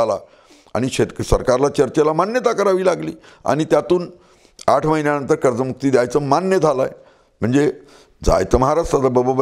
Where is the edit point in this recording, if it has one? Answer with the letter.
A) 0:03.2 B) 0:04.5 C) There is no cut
C